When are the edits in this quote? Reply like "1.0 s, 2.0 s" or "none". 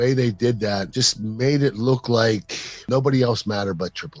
0.9 s, 2.9 s